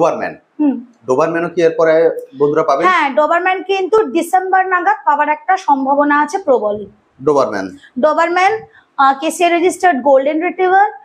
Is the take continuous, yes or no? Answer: yes